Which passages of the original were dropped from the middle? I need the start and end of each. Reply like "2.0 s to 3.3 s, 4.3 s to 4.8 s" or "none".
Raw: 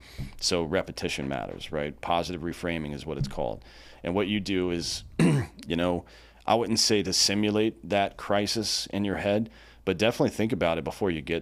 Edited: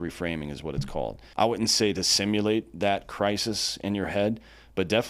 3.6 s to 6.3 s